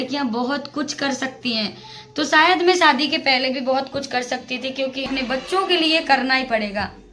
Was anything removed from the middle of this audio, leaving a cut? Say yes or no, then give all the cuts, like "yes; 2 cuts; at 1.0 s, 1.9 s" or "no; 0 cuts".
yes; 1 cut; at 5.1 s